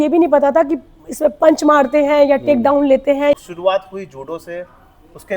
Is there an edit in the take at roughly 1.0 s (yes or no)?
no